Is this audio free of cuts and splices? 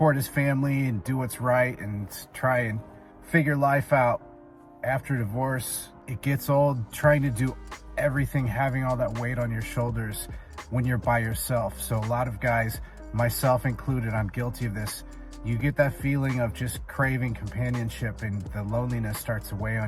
yes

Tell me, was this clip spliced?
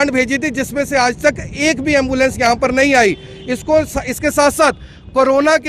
no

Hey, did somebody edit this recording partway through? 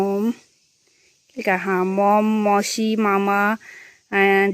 no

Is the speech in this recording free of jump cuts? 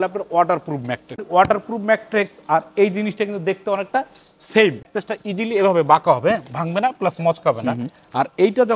no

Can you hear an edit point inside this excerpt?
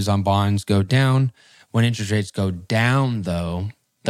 no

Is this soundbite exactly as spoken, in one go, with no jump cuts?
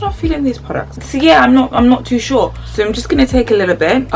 no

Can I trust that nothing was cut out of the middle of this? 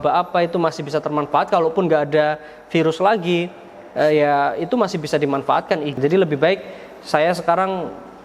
no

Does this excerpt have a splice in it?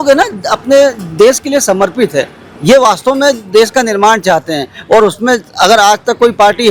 no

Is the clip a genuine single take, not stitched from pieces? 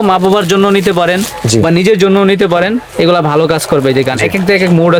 yes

